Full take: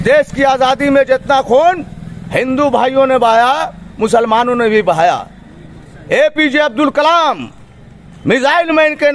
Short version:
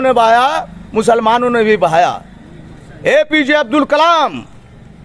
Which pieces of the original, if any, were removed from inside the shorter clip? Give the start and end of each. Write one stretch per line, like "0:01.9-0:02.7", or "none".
none